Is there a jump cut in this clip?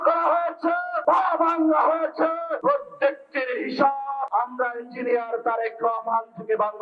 yes; 3 cuts; at 0.9 s, 2.5 s, 4.3 s

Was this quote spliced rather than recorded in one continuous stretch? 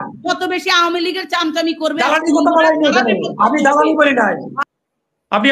yes; 1 cut; at 4.5 s

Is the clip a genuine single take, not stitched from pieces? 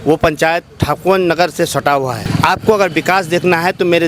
no; 1 cut; at 2.2 s

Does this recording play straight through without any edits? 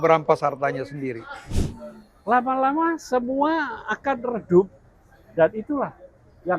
no; 1 cut; at 1.4 s

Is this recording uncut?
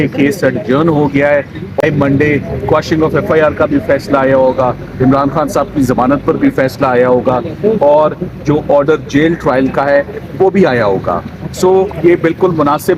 no; 1 cut; at 1.8 s

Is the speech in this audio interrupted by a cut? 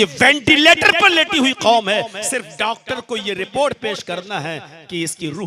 no; 0 cuts

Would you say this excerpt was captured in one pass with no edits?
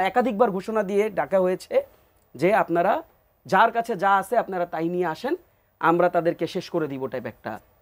yes; 0 cuts

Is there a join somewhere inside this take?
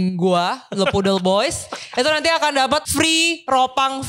yes; 1 cut; at 2.9 s

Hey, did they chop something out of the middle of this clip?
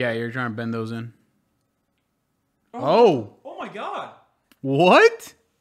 no; 0 cuts

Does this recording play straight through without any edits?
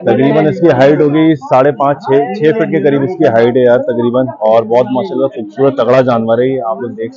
yes; 0 cuts

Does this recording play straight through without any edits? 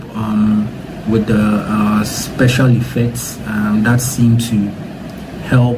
yes; 0 cuts

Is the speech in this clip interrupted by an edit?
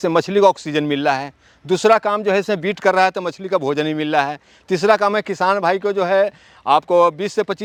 no; 0 cuts

